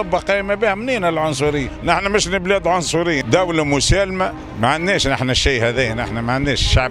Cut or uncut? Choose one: cut